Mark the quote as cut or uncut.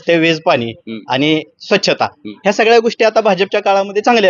uncut